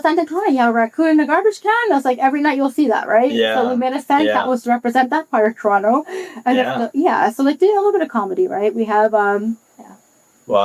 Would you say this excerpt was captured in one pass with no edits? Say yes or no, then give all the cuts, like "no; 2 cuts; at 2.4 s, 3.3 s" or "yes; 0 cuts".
yes; 0 cuts